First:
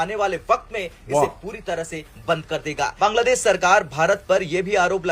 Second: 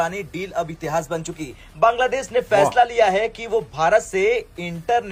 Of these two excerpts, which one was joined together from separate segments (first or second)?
first